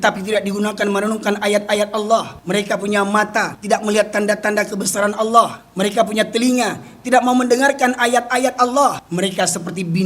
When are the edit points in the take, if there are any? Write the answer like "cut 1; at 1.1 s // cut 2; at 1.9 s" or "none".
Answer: cut 1; at 2.4 s // cut 2; at 3.5 s // cut 3; at 5.6 s // cut 4; at 9.0 s